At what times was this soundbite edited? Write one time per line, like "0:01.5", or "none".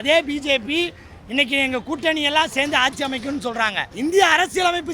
0:03.8